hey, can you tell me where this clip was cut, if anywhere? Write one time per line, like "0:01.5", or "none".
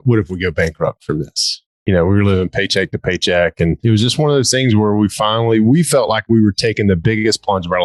none